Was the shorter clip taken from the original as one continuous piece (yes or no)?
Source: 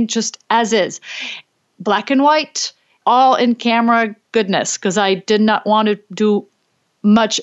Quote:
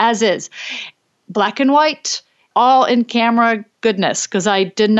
yes